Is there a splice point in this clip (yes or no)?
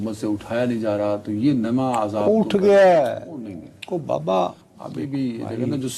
no